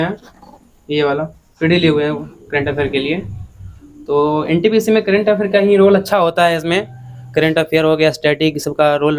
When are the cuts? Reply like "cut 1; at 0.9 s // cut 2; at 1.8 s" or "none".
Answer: cut 1; at 1.4 s